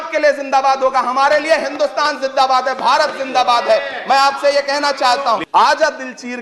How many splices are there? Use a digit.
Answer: 1